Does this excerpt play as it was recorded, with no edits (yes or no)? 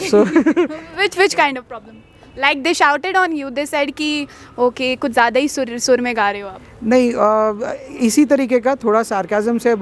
yes